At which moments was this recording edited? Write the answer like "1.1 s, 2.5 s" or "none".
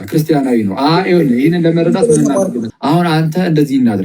2.6 s